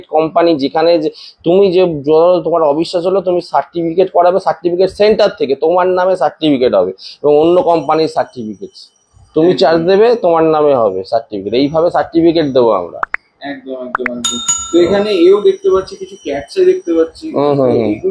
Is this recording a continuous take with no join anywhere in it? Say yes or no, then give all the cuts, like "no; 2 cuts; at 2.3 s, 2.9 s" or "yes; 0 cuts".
yes; 0 cuts